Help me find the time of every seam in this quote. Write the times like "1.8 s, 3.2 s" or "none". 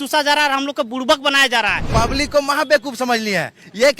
1.8 s